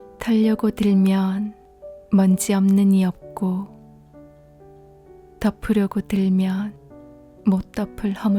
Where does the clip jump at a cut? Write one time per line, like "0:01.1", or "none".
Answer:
none